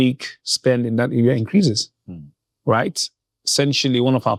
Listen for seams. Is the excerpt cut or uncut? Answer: uncut